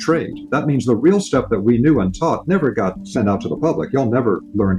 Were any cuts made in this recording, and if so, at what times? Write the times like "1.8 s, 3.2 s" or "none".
3.0 s